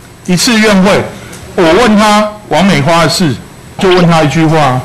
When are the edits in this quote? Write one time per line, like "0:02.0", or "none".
0:03.8